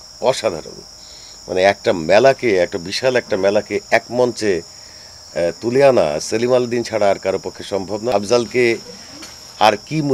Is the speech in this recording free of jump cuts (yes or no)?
no